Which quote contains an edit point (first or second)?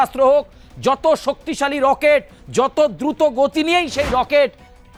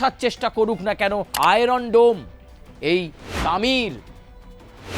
second